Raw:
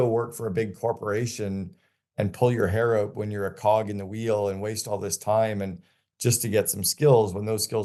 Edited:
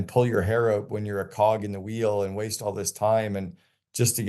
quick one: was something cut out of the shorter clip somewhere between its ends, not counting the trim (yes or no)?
no